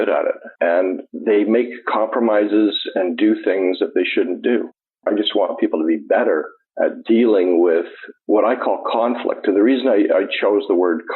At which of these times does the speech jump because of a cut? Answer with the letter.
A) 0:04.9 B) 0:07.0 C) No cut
A